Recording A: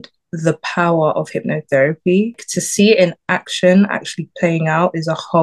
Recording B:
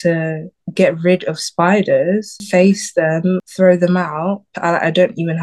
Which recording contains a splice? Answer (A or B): B